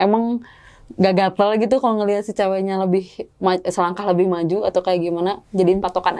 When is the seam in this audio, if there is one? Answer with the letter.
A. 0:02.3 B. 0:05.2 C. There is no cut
C